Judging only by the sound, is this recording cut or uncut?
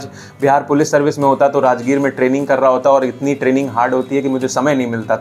uncut